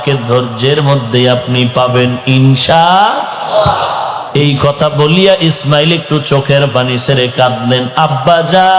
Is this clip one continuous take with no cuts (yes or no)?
no